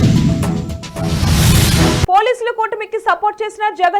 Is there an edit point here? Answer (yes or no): yes